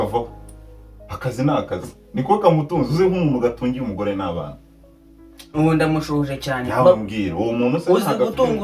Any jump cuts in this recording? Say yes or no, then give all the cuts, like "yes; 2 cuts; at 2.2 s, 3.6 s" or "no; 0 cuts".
no; 0 cuts